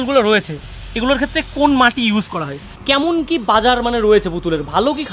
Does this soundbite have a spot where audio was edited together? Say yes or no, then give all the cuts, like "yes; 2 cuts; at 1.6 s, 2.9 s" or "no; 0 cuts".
yes; 1 cut; at 2.7 s